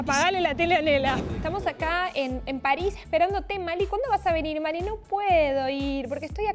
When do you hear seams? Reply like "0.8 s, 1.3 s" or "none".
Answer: 1.3 s